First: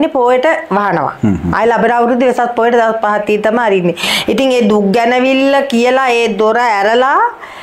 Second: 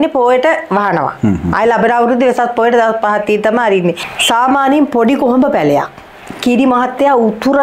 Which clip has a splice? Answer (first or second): second